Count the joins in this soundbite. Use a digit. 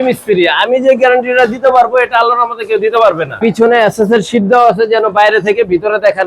1